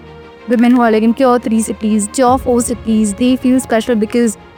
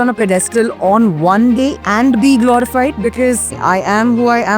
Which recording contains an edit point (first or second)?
second